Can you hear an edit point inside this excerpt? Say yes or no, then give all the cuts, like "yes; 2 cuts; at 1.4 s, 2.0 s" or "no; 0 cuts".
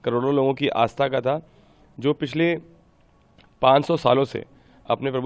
no; 0 cuts